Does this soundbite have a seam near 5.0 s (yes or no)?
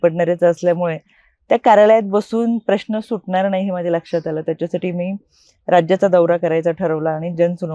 no